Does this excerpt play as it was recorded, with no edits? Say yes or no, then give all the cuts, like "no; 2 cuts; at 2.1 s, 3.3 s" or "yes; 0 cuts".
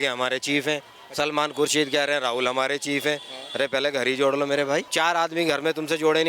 no; 1 cut; at 4.9 s